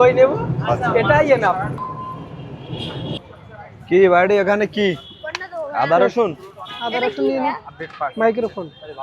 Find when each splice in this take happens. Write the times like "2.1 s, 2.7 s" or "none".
none